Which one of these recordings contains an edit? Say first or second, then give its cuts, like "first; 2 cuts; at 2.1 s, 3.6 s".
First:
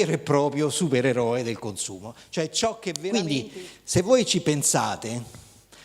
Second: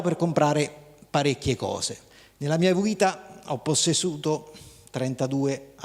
first; 1 cut; at 2.9 s